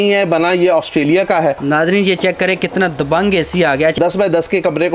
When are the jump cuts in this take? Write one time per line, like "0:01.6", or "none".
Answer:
0:01.6
0:03.9